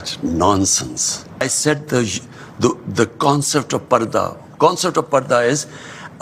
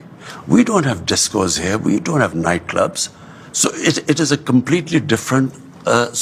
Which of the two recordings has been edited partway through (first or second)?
first